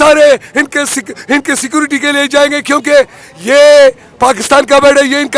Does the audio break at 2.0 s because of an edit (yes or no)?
no